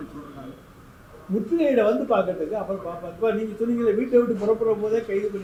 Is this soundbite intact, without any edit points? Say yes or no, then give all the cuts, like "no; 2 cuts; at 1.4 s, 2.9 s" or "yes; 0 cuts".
yes; 0 cuts